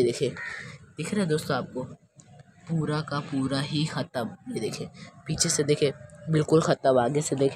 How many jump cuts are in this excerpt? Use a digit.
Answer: 0